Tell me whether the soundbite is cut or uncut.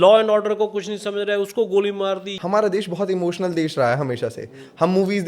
cut